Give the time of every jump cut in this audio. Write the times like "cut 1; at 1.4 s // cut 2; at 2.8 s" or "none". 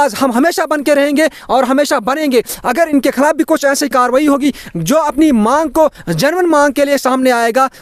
none